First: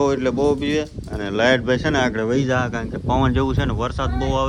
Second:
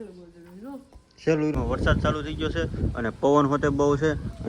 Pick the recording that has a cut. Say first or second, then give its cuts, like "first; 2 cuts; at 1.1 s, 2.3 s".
second; 1 cut; at 1.6 s